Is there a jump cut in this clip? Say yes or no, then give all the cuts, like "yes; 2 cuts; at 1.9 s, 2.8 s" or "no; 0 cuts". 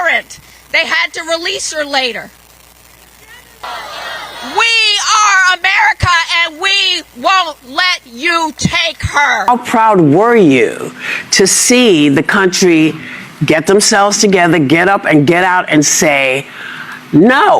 yes; 1 cut; at 9.5 s